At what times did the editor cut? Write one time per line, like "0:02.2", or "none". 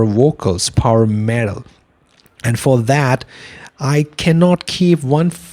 none